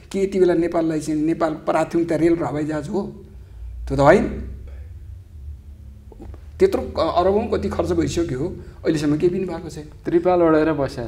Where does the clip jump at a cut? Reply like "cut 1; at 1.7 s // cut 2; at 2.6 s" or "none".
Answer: none